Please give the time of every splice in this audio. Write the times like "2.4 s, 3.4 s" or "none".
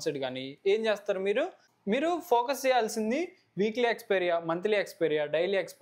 1.6 s